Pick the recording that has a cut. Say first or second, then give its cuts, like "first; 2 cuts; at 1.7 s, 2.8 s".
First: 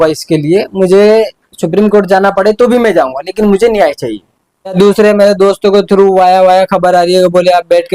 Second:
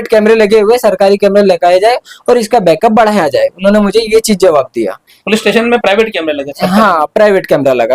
first; 1 cut; at 4.7 s